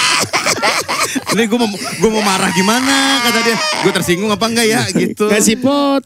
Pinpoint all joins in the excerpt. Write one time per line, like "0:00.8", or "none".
none

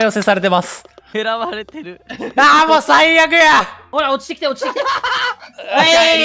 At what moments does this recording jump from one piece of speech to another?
0:01.1
0:03.8

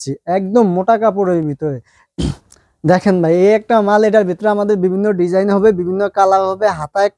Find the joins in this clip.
none

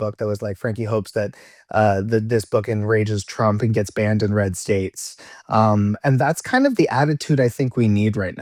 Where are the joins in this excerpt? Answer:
none

